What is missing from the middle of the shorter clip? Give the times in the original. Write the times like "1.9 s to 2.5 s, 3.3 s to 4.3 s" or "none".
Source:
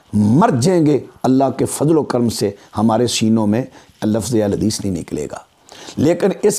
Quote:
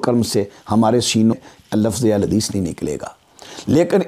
3.4 s to 3.6 s